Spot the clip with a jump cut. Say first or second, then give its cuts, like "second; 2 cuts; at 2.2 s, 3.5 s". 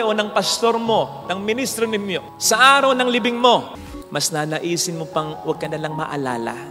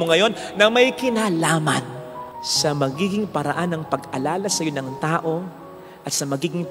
first; 1 cut; at 3.9 s